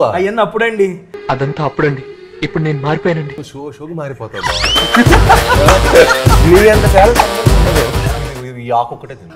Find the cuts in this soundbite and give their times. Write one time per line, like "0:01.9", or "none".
0:08.1